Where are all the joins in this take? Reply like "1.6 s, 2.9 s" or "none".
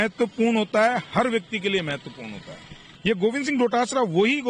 2.9 s